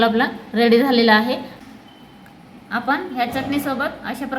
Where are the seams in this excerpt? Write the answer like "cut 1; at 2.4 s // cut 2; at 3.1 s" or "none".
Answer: cut 1; at 1.5 s